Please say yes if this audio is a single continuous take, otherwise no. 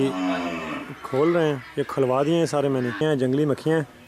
no